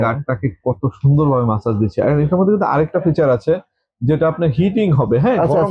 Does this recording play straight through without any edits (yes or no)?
yes